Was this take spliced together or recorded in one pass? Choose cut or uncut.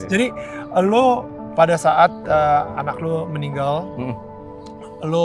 uncut